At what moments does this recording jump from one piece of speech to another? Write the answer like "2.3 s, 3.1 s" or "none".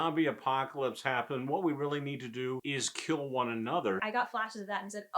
2.6 s, 4.0 s